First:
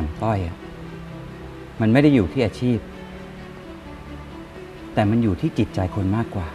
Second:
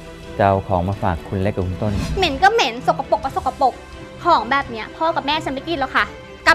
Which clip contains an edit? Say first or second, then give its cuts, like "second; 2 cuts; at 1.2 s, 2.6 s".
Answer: second; 1 cut; at 2.0 s